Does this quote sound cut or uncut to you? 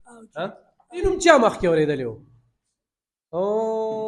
cut